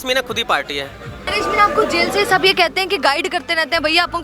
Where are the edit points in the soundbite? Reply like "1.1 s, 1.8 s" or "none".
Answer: 1.3 s